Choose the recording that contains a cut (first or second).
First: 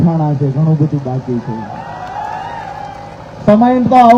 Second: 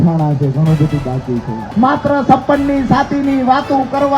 second